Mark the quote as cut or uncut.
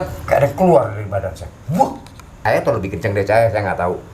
cut